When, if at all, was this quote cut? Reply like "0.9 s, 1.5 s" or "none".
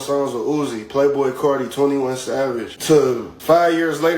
2.7 s, 3.3 s